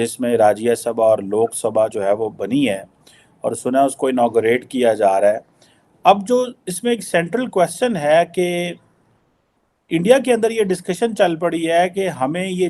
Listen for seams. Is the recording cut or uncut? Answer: uncut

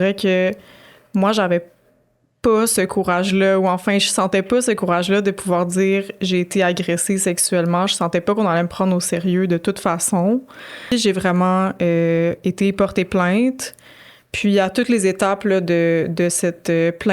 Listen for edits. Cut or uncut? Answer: cut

